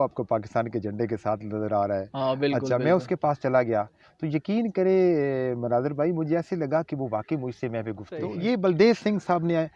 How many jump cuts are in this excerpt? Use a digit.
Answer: 1